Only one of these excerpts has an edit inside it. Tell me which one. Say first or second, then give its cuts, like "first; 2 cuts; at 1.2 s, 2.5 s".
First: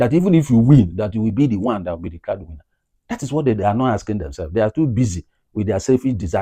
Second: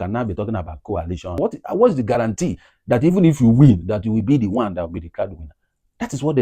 second; 1 cut; at 1.4 s